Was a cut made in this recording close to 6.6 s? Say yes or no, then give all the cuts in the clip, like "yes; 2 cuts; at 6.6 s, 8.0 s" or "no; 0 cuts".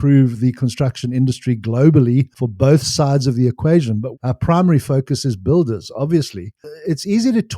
yes; 2 cuts; at 4.1 s, 6.6 s